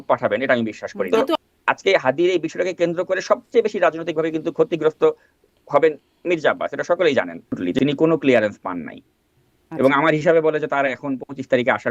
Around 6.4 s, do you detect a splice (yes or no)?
no